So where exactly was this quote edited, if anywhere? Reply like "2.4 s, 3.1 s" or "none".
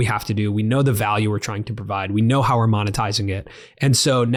none